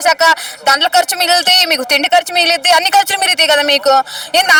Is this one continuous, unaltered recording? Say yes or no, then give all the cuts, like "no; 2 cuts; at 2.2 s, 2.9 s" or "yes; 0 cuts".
yes; 0 cuts